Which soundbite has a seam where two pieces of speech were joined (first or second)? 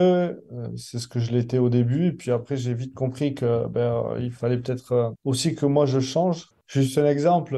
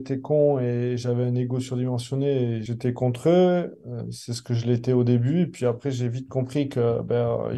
first